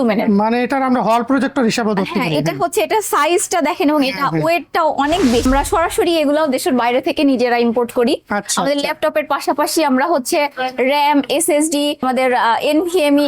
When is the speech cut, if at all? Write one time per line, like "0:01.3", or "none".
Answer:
0:05.4
0:12.0